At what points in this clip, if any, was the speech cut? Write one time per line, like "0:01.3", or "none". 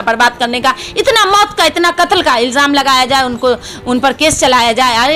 none